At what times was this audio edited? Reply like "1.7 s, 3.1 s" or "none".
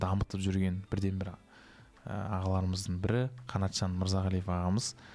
none